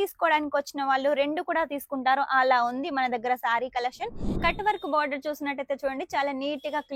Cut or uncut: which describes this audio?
cut